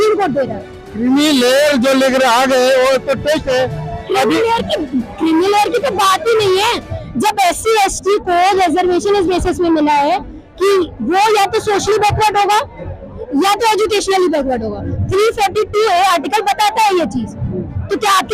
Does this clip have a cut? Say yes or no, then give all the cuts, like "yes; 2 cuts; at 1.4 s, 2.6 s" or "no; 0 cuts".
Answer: no; 0 cuts